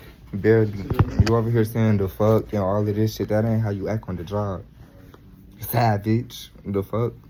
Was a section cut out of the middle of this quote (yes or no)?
no